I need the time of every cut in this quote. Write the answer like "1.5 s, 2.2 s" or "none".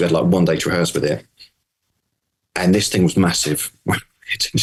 none